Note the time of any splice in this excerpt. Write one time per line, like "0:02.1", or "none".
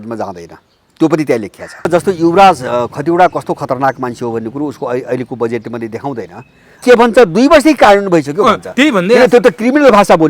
0:01.9
0:06.8